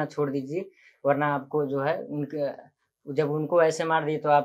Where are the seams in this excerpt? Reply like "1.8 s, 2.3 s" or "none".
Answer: none